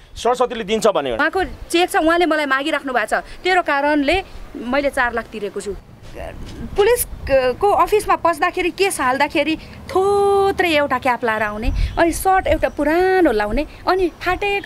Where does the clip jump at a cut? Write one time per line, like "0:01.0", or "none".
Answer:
0:01.2
0:05.8